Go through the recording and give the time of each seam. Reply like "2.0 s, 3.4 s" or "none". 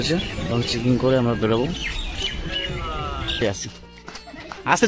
3.4 s